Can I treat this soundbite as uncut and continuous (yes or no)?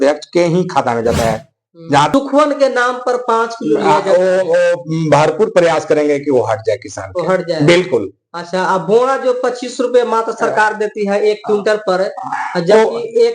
no